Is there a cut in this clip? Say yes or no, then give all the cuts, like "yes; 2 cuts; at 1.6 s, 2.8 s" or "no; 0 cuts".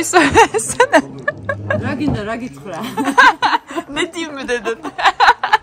no; 0 cuts